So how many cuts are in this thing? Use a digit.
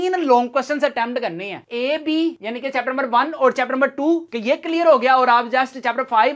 0